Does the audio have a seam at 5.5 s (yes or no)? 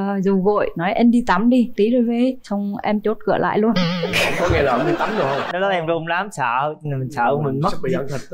yes